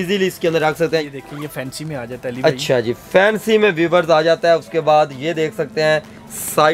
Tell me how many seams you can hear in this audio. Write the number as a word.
one